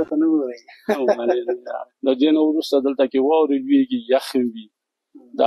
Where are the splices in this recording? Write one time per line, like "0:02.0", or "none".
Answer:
0:01.9